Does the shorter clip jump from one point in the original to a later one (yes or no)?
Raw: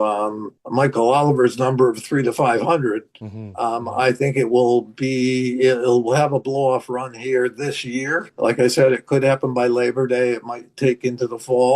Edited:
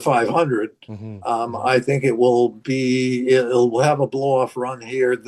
no